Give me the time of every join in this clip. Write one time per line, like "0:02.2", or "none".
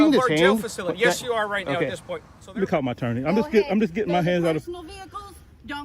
0:02.3